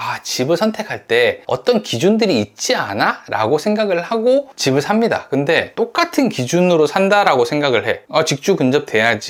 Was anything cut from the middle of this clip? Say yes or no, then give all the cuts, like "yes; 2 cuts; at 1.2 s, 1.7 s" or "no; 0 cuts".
no; 0 cuts